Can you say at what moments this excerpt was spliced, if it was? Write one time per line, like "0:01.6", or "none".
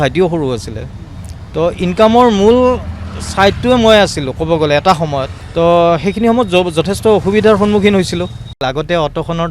0:05.4
0:08.6